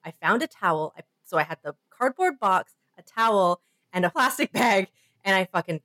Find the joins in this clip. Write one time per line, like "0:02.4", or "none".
0:04.1